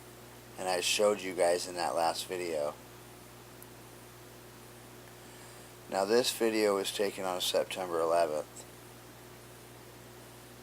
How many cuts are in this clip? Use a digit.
1